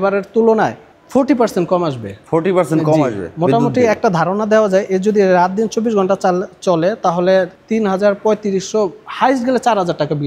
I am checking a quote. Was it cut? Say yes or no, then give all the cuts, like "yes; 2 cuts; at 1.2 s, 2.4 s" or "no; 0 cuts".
no; 0 cuts